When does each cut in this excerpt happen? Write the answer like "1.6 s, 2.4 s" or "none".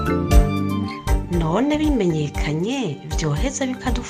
1.2 s